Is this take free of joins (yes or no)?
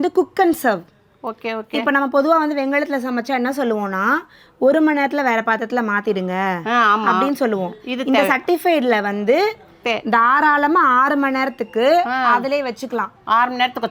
yes